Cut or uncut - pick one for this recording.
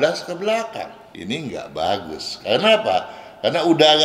cut